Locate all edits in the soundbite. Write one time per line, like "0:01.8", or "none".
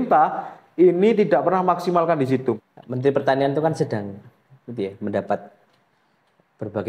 0:02.7